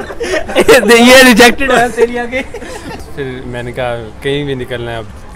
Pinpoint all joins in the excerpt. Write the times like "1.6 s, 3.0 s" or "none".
2.9 s